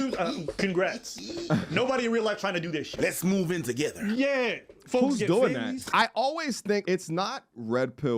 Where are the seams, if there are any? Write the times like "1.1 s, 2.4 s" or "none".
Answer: 5.8 s, 6.8 s